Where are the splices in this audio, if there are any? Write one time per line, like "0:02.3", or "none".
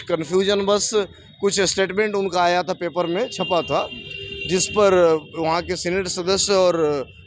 none

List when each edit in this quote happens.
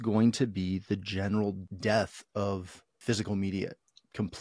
0:01.6
0:03.0

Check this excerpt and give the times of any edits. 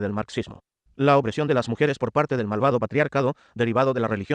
none

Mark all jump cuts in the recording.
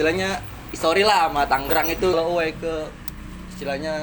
0:02.1

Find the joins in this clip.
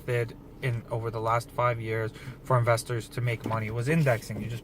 0:01.5

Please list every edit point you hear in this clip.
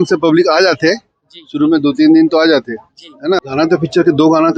0:03.4

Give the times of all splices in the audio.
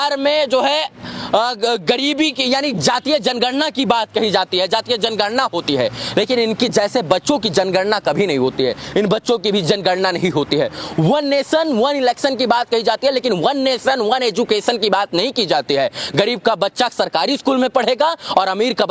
none

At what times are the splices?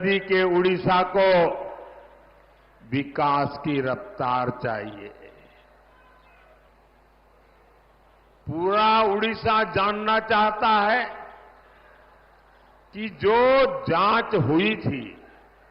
0:06.7

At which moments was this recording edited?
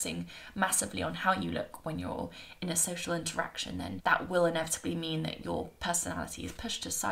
0:04.0

